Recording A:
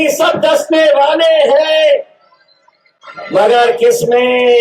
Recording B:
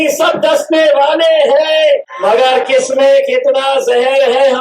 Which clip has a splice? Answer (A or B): B